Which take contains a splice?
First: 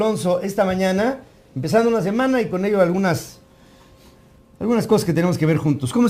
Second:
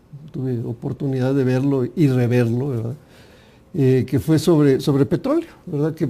second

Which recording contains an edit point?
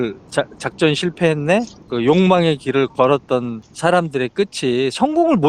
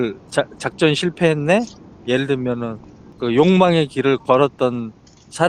first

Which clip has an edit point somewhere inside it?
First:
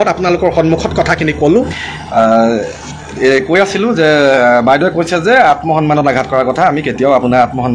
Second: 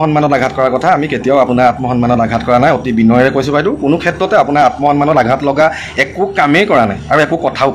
first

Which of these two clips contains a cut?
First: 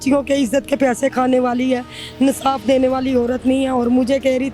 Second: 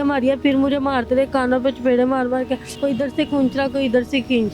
second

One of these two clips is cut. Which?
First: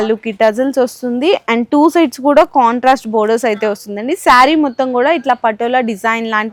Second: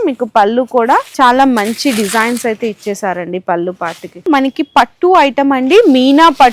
second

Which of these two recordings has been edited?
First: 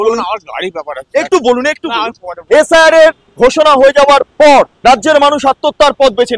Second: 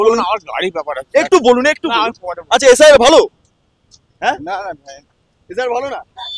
first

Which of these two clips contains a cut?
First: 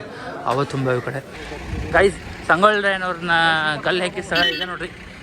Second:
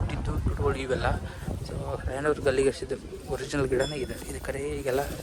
first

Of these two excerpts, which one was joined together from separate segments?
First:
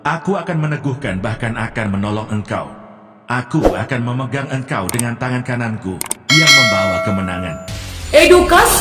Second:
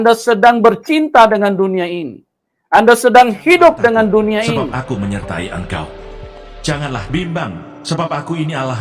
second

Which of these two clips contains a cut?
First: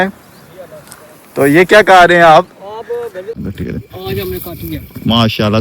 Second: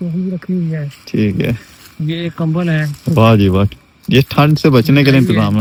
first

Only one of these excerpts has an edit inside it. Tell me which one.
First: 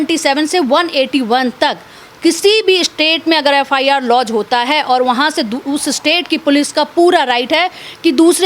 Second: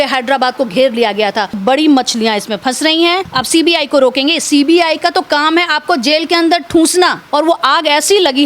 second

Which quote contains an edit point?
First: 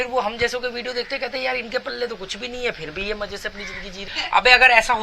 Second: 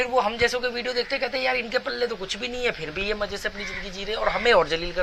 first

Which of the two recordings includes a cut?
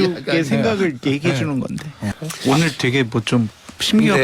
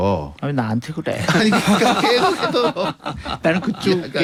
first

